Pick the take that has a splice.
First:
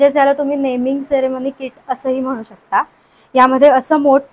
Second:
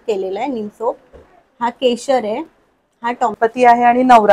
second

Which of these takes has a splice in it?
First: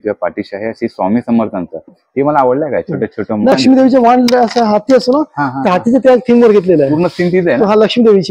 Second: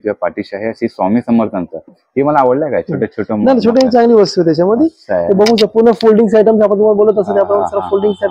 first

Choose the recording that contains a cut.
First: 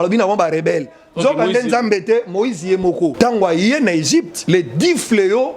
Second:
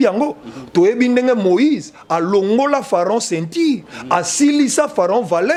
first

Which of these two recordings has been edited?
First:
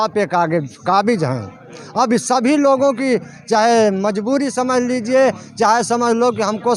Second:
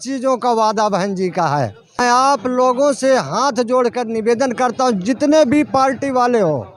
second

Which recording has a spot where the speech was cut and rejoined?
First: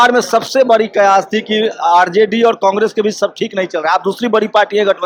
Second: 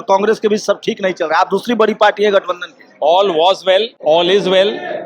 second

